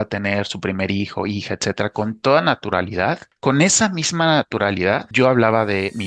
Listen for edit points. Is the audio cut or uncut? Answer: cut